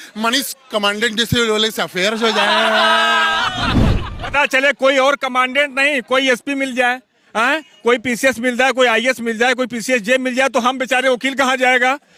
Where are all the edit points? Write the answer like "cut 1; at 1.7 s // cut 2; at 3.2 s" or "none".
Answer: none